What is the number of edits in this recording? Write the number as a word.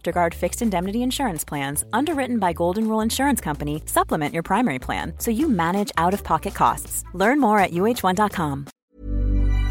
one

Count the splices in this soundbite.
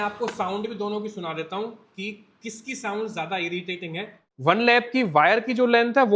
one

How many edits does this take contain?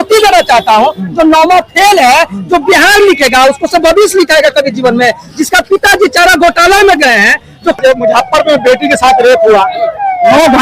one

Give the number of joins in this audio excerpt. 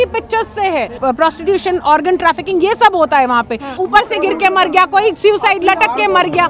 two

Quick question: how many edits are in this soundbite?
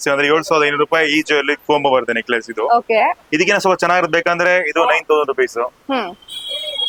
zero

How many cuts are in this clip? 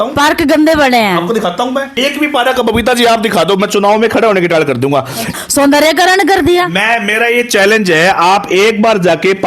two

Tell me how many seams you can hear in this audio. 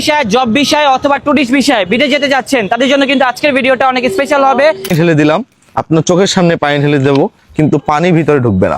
one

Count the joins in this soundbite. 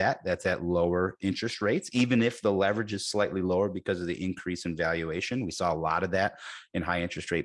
zero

